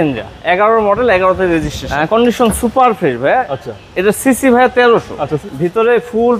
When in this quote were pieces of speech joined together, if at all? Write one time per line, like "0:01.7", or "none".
0:01.8
0:05.4